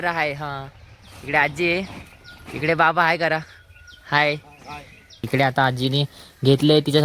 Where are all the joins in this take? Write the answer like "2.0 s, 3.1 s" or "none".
5.1 s